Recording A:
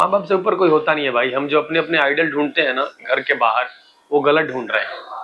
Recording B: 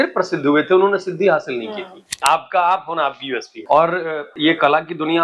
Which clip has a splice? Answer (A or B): B